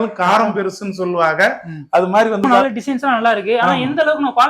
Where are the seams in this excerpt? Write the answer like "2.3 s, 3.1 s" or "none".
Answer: 2.4 s